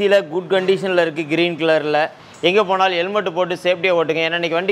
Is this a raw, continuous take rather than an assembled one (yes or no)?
no